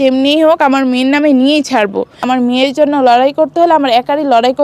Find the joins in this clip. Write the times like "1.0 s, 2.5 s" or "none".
2.2 s